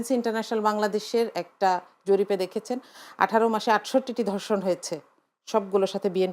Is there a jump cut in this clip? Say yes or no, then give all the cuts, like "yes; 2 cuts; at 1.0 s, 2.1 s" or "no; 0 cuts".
no; 0 cuts